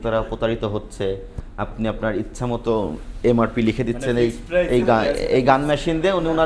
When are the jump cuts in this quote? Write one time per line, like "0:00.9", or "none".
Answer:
none